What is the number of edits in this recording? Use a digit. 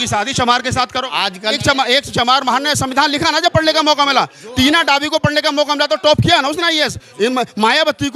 1